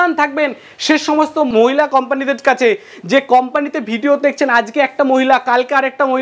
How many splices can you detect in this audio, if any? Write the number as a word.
one